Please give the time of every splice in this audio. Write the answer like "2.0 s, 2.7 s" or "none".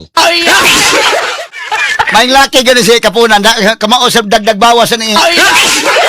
1.6 s